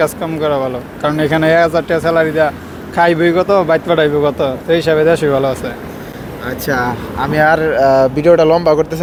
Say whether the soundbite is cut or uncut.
uncut